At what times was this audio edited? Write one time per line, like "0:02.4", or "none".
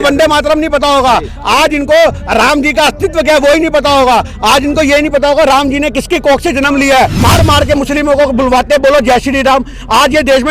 0:07.2